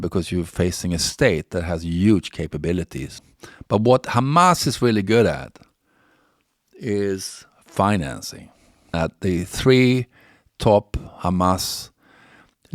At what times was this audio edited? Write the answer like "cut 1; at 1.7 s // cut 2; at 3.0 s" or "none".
cut 1; at 3.1 s // cut 2; at 8.9 s